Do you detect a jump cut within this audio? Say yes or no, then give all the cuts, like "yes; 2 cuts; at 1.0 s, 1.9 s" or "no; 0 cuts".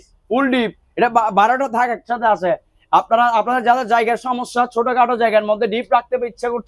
no; 0 cuts